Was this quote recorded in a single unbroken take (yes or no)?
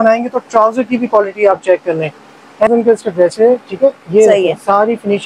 no